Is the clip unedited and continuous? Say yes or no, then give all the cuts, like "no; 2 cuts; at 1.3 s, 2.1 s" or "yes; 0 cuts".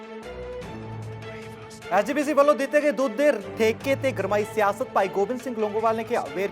no; 1 cut; at 1.9 s